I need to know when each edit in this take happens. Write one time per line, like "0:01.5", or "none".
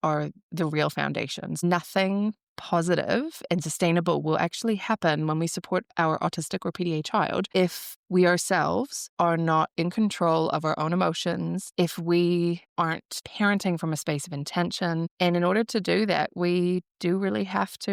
none